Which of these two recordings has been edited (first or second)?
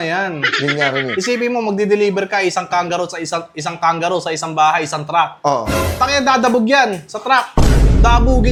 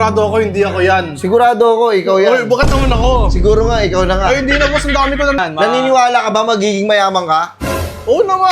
second